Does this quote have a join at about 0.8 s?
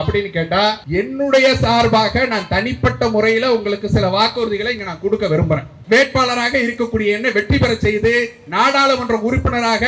yes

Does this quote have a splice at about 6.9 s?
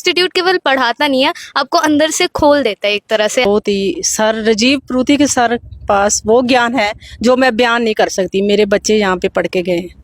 no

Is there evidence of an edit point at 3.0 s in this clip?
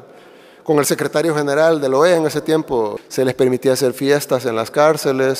yes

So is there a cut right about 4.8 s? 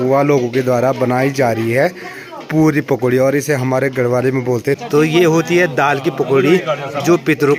yes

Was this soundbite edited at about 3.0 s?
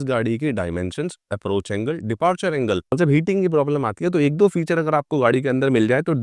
yes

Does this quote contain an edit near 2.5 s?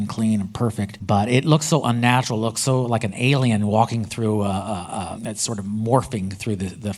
no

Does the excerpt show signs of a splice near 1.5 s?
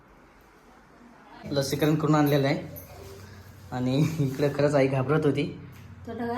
yes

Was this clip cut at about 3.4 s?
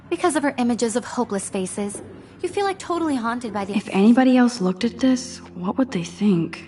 yes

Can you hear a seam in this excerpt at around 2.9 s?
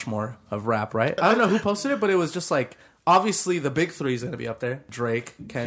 no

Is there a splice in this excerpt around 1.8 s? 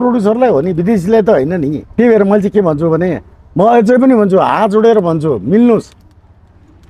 yes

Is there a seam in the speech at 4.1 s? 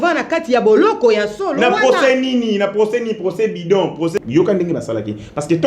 yes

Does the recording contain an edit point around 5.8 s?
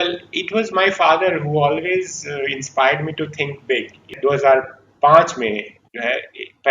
no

